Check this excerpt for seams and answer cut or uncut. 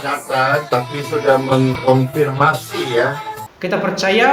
cut